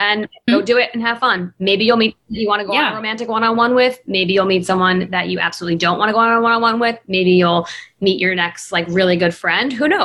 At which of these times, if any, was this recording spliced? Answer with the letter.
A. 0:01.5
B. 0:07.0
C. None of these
C